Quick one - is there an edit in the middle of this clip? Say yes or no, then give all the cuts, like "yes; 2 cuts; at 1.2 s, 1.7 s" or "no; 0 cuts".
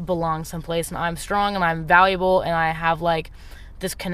no; 0 cuts